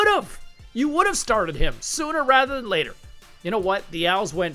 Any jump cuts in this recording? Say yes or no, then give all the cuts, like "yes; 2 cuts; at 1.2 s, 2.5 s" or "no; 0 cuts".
yes; 1 cut; at 3.0 s